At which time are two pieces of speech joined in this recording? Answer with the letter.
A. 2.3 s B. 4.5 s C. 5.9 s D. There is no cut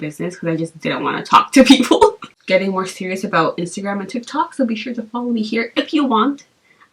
A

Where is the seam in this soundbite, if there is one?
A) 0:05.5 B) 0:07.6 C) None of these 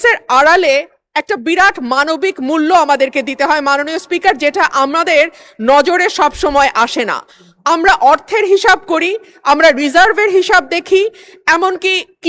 C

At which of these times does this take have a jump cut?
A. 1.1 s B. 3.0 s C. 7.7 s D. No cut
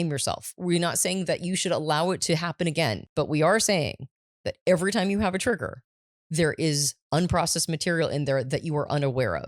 B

